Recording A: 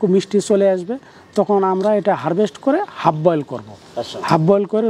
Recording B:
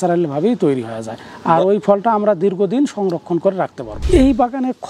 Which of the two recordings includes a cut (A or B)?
B